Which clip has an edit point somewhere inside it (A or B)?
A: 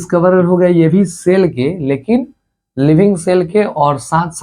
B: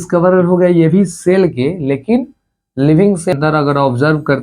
B